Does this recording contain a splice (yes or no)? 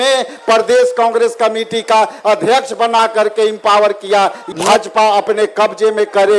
yes